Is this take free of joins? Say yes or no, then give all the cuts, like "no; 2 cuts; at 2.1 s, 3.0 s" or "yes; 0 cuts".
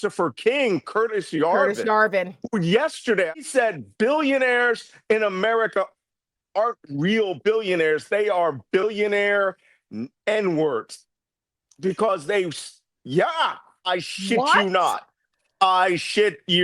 no; 1 cut; at 3.4 s